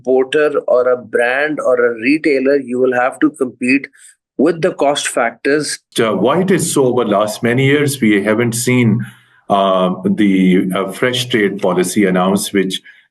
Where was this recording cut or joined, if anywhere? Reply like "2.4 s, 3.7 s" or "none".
5.9 s